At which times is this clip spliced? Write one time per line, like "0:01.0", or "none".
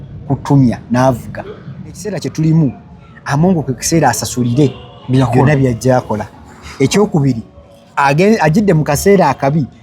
0:02.1